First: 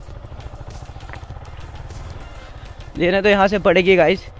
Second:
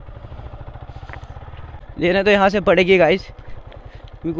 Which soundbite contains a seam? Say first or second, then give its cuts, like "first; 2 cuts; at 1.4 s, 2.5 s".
second; 1 cut; at 1.8 s